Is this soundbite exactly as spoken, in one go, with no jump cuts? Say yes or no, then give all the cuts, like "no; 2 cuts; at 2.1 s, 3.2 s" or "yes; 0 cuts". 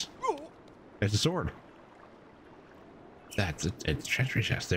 yes; 0 cuts